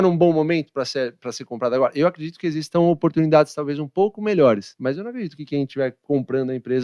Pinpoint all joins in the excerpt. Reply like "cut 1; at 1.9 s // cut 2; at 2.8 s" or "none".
none